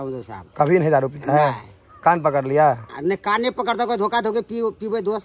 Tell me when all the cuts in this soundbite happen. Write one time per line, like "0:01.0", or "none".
none